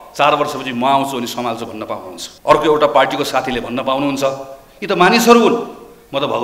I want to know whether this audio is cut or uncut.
cut